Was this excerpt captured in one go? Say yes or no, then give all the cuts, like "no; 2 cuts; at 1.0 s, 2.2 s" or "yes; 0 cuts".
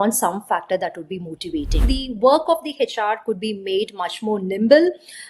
no; 1 cut; at 1.9 s